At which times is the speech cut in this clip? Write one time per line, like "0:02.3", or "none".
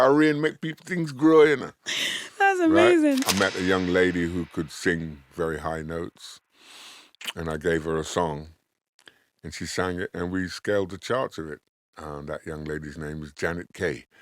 0:03.2